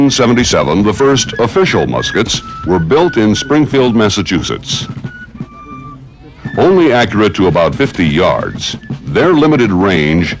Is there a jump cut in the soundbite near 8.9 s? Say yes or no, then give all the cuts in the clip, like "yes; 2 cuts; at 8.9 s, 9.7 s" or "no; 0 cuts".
no; 1 cut; at 6.4 s